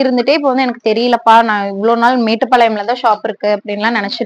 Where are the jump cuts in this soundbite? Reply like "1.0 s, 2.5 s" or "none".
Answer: none